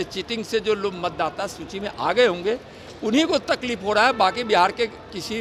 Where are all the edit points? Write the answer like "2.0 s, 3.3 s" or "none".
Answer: none